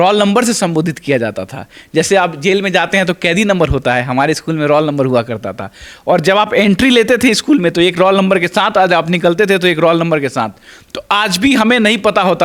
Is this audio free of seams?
yes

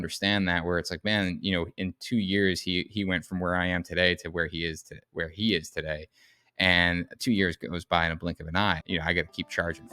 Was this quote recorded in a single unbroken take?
no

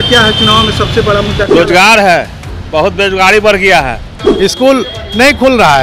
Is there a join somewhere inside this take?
yes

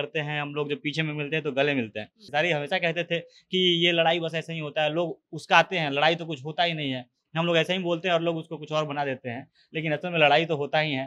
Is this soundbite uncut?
no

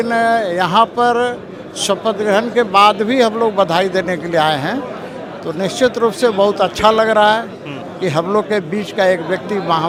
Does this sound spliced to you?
no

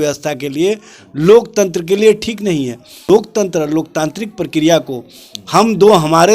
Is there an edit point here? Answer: yes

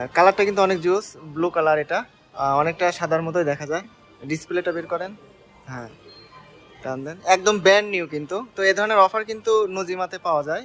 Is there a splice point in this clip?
no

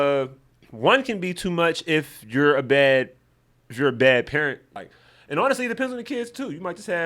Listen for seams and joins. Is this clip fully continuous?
no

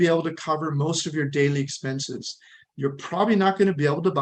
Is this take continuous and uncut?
yes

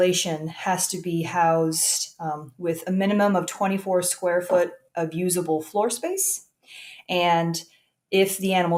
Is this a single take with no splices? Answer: yes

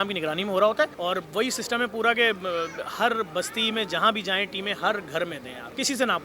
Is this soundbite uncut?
no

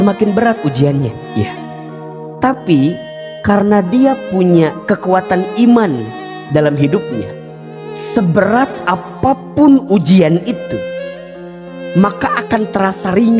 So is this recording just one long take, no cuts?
yes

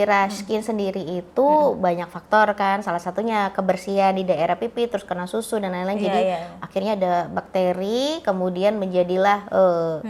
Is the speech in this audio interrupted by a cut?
no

